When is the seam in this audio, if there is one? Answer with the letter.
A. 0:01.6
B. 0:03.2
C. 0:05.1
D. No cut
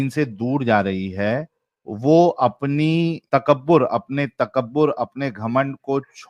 B